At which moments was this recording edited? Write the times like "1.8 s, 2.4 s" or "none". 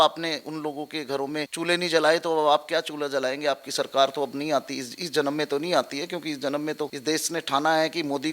1.5 s, 7.0 s